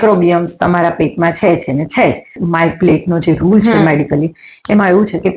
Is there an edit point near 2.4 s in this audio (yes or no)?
yes